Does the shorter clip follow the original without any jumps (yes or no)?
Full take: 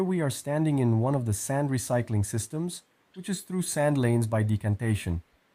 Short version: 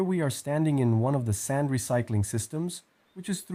yes